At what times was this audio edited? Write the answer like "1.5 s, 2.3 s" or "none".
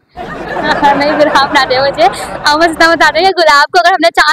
none